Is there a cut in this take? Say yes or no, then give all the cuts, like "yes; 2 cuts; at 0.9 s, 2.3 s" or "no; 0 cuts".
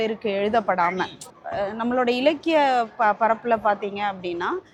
no; 0 cuts